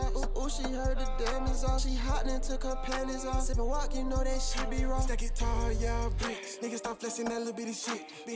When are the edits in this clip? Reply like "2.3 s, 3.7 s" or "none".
none